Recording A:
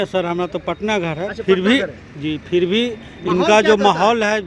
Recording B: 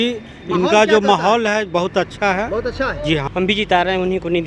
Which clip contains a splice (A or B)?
B